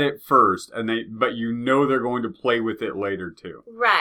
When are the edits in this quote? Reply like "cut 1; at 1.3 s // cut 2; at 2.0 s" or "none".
none